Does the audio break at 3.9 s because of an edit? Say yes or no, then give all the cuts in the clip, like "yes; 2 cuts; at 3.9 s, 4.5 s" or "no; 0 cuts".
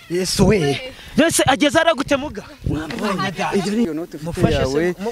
yes; 1 cut; at 3.9 s